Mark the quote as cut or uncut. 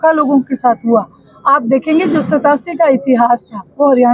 uncut